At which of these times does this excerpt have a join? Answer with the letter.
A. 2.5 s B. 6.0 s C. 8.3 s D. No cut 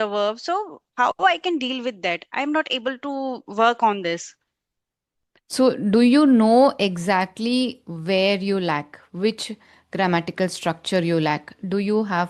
D